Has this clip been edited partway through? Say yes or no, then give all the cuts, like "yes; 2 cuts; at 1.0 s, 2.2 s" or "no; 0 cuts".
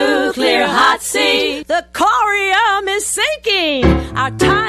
no; 0 cuts